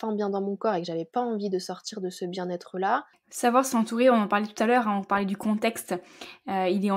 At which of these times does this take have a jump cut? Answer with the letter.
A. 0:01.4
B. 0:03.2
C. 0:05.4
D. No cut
B